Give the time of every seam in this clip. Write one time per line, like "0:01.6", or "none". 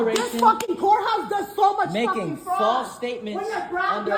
none